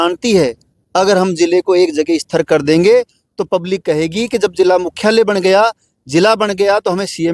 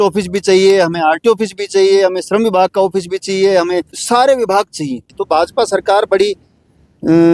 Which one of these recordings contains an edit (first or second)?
second